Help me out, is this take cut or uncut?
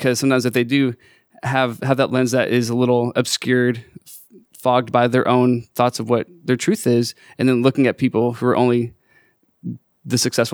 uncut